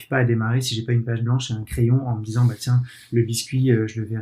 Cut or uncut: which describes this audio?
uncut